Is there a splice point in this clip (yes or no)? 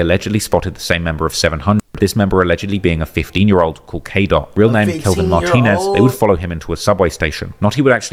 no